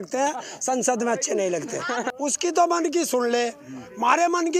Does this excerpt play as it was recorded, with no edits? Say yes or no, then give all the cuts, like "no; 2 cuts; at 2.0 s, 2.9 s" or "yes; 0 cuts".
no; 1 cut; at 2.1 s